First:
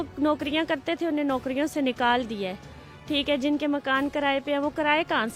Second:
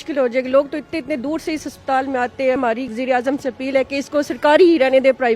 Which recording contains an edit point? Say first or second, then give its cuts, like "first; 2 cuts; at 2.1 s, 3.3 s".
second; 1 cut; at 2.6 s